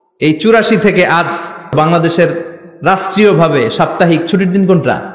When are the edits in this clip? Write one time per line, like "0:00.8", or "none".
0:01.7